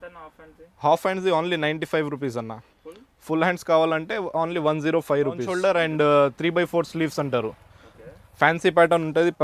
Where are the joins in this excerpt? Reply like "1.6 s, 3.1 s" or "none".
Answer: 5.5 s